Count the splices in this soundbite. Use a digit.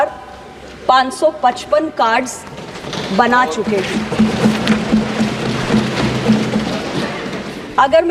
0